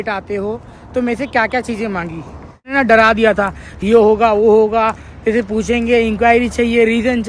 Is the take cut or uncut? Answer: cut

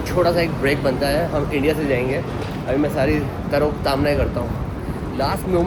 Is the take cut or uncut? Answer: uncut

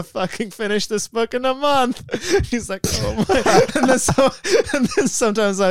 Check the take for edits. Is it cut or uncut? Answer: uncut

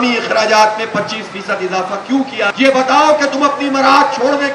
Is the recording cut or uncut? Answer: cut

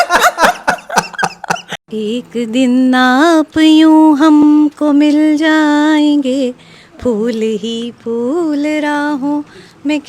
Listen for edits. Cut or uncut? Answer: cut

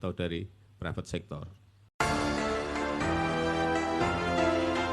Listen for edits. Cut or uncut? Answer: cut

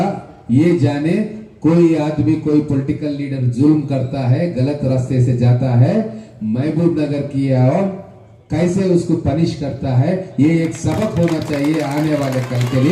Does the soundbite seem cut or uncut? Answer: uncut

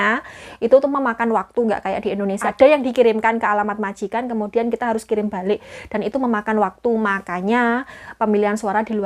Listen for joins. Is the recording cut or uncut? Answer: cut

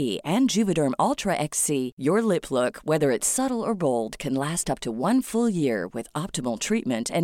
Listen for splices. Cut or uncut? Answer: uncut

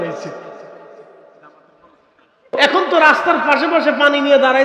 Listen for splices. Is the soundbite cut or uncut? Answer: cut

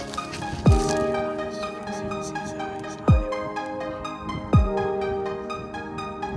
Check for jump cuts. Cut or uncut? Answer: uncut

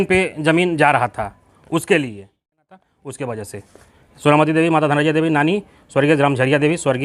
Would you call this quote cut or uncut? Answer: cut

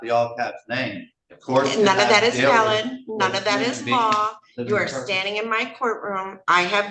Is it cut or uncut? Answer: uncut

